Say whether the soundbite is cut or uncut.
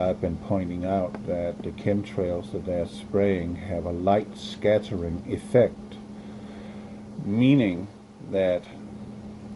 cut